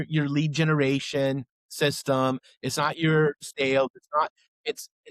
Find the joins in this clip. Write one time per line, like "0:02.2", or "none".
0:03.5